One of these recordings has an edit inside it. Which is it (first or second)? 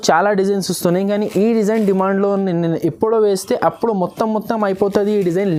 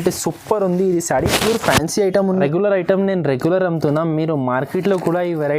second